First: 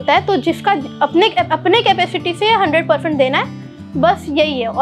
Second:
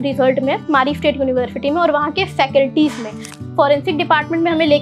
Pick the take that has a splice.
second; 1 cut; at 3.5 s

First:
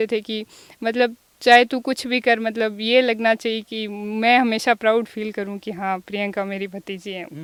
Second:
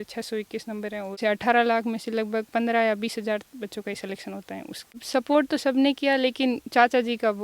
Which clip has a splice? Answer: second; 2 cuts; at 1.2 s, 5.0 s

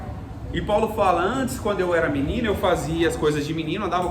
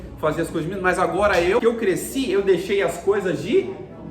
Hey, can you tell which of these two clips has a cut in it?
second; 1 cut; at 1.6 s

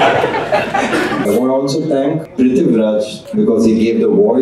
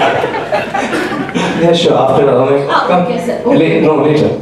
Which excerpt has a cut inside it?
first; 3 cuts; at 1.2 s, 2.3 s, 3.2 s

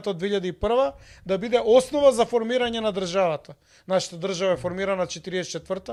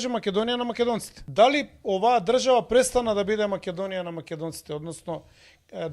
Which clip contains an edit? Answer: second; 1 cut; at 1.2 s

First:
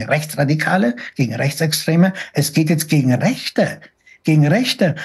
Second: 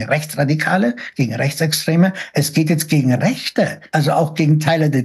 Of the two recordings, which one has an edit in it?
second; 1 cut; at 3.8 s

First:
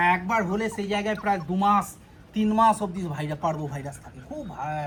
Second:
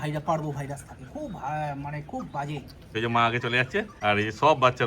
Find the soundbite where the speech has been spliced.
second; 2 cuts; at 2.9 s, 3.9 s

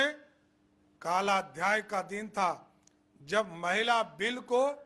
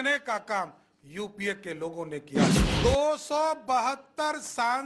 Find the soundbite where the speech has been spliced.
second; 1 cut; at 2.6 s

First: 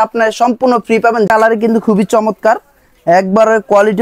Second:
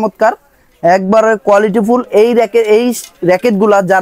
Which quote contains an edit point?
first; 1 cut; at 1.3 s

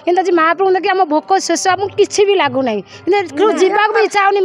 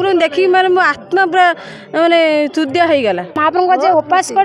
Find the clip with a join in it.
second; 1 cut; at 3.3 s

